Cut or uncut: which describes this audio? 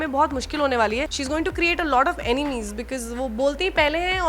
cut